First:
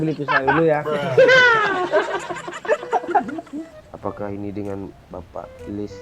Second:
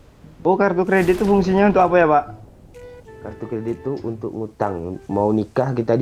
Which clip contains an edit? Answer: first; 1 cut; at 3.6 s

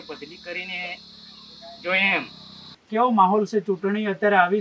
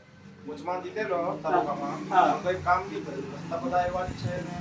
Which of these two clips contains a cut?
first; 1 cut; at 2.7 s

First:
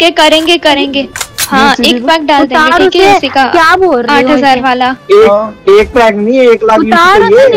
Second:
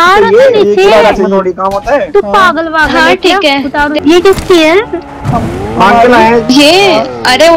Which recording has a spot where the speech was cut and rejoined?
second; 1 cut; at 3.9 s

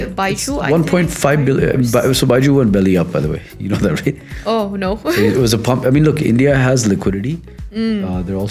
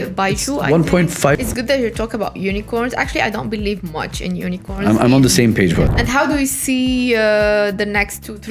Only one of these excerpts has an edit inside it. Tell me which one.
second; 2 cuts; at 1.4 s, 5.9 s

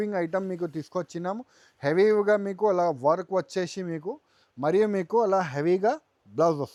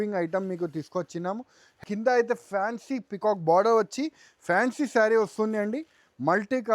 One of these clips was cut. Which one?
second; 1 cut; at 1.8 s

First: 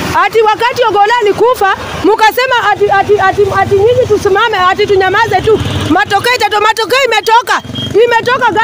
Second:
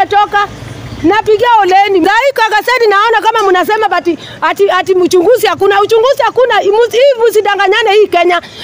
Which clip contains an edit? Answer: second; 1 cut; at 2.0 s

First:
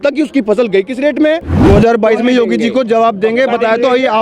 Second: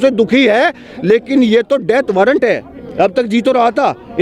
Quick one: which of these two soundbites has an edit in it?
first; 1 cut; at 1.5 s

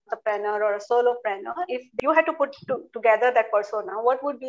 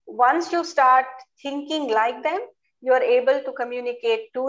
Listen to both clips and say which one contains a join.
first; 1 cut; at 1.9 s

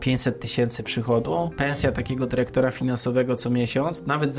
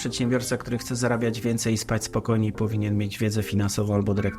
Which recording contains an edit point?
first; 1 cut; at 1.5 s

